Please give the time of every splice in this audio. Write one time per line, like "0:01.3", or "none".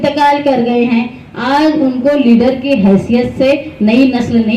none